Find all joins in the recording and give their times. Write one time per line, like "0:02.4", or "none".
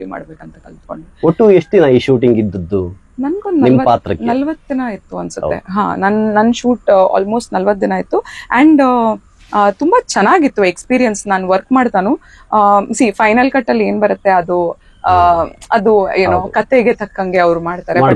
none